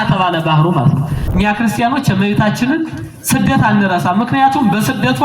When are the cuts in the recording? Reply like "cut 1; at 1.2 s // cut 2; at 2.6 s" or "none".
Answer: cut 1; at 1.2 s